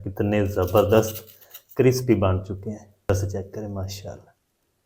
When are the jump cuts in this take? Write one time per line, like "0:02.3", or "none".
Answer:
0:03.1

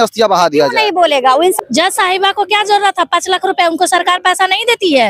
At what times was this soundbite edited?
0:01.6

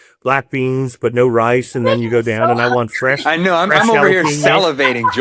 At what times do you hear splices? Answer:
none

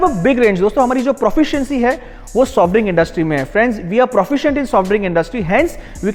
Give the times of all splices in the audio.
none

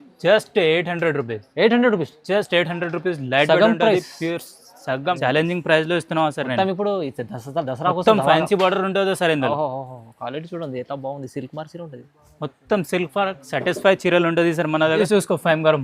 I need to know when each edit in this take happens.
0:05.2
0:15.0

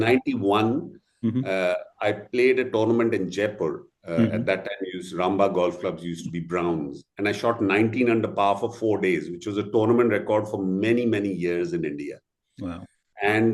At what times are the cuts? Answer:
none

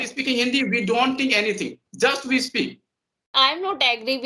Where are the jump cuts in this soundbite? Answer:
0:03.3

